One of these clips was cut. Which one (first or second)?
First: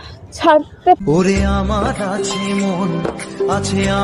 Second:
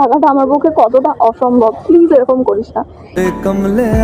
second